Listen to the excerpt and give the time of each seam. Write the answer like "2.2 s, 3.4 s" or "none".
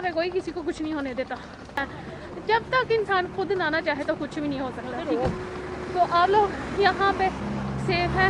1.8 s